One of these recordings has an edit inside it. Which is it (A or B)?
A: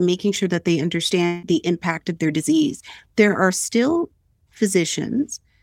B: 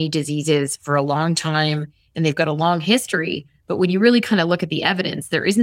A